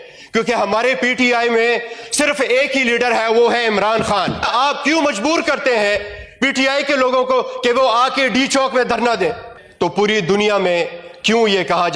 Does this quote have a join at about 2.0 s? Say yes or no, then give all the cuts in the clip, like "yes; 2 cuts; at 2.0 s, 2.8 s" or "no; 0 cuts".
no; 2 cuts; at 4.5 s, 9.5 s